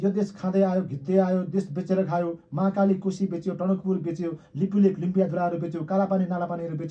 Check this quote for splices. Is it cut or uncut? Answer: uncut